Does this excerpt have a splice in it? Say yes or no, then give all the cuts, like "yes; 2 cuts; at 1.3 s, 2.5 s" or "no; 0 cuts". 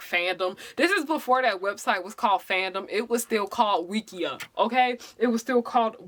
no; 0 cuts